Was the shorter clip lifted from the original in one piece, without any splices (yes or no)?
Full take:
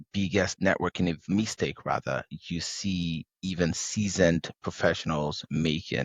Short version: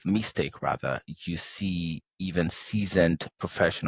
yes